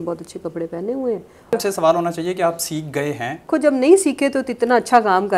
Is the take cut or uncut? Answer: cut